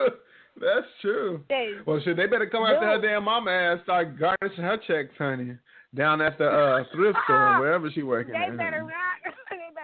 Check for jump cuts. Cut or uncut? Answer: uncut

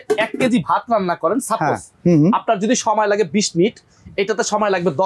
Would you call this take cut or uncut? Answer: uncut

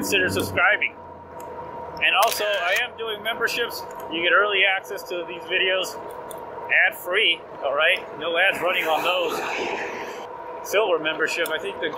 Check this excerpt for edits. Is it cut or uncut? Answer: cut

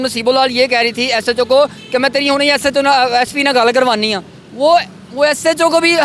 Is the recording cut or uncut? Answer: uncut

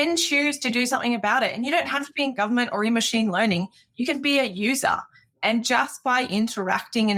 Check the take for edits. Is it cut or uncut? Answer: uncut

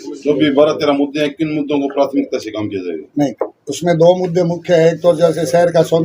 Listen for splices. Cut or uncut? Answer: uncut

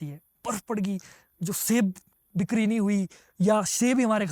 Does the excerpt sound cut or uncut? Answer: uncut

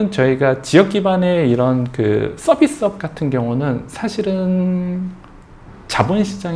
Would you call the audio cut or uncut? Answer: uncut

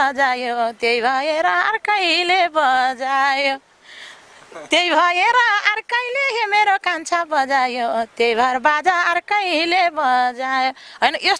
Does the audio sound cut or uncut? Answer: uncut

